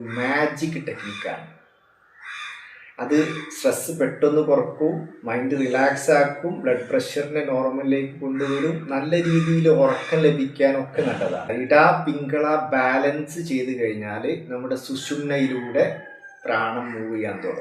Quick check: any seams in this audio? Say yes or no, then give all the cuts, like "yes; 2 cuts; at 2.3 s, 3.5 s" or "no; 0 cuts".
yes; 1 cut; at 11.5 s